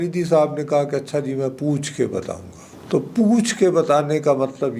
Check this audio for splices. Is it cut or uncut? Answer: uncut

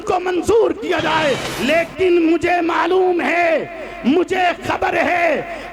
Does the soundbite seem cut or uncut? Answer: cut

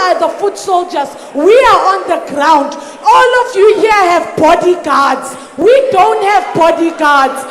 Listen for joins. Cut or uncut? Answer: uncut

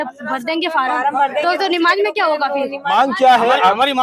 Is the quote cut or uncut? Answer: cut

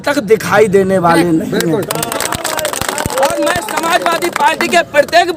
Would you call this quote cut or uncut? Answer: uncut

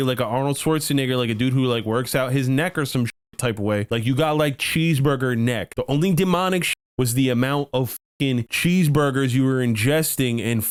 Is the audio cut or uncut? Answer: uncut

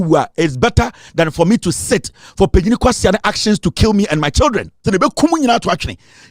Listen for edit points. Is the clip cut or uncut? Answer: cut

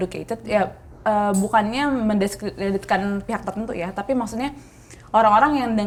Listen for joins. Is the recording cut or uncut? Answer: uncut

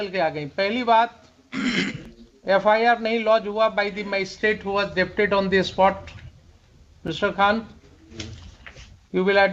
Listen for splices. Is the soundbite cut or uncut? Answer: uncut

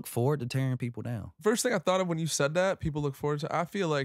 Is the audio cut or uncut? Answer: cut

